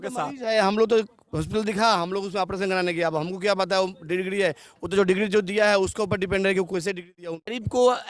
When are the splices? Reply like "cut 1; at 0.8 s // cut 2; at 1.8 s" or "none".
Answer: cut 1; at 7.2 s